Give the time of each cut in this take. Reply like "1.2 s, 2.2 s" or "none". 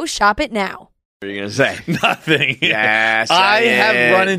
1.1 s

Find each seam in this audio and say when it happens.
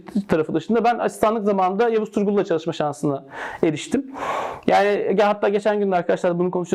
none

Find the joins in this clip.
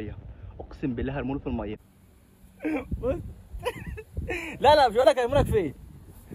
1.9 s

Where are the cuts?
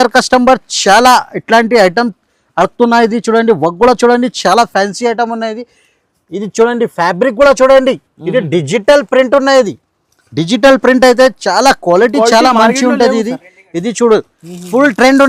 none

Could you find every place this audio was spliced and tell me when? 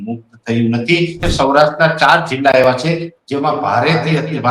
1.3 s

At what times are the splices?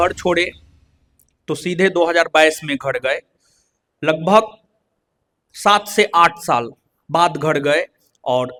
none

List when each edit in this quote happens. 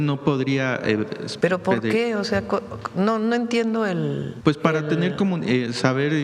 1.2 s, 4.3 s

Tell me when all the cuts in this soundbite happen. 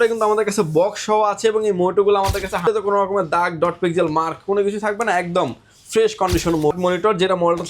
2.7 s, 6.7 s

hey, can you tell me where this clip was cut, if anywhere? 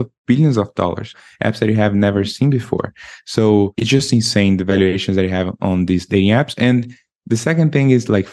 1.1 s, 3.8 s

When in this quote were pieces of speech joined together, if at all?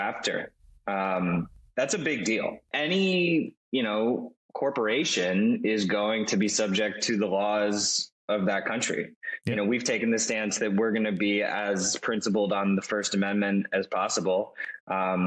2.7 s

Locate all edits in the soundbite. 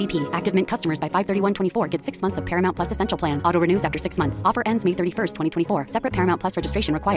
none

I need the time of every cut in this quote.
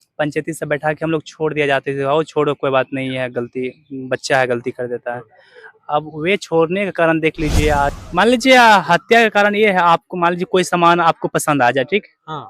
8.0 s

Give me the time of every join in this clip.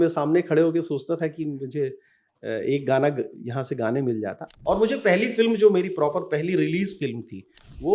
4.5 s

